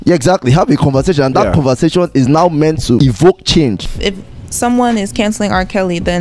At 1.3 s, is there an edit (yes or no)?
no